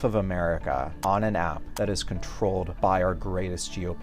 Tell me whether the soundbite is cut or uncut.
cut